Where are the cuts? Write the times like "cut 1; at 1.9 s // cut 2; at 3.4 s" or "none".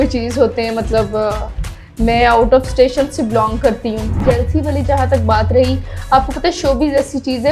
cut 1; at 4.2 s